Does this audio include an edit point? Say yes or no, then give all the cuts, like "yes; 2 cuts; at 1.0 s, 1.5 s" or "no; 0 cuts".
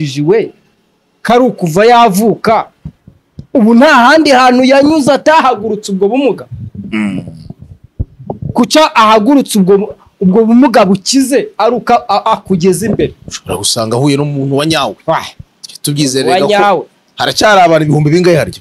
no; 0 cuts